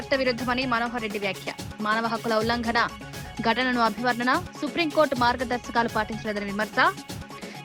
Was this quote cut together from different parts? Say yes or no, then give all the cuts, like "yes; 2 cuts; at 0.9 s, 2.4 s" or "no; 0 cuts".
no; 0 cuts